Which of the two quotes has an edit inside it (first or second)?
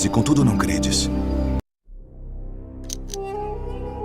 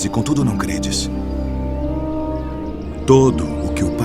second